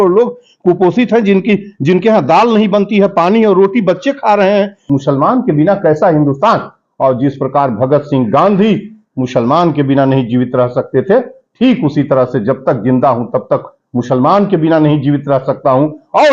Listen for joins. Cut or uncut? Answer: cut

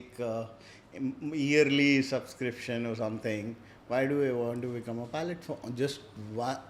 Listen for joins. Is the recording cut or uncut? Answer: uncut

